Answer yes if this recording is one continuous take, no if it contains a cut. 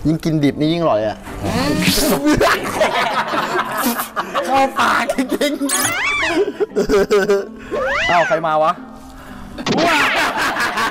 yes